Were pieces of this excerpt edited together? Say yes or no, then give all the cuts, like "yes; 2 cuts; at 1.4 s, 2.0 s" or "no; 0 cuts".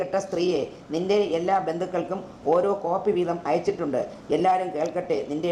no; 0 cuts